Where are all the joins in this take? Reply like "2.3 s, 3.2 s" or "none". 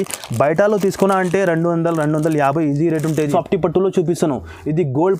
3.3 s